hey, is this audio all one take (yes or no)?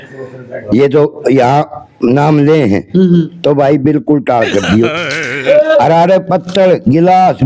yes